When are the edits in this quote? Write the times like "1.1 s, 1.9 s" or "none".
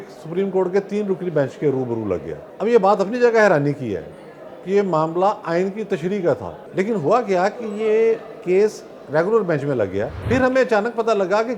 2.4 s, 6.6 s, 10.2 s